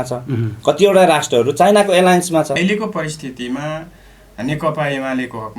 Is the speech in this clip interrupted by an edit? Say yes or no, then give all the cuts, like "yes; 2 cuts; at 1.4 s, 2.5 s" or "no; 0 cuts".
yes; 1 cut; at 2.6 s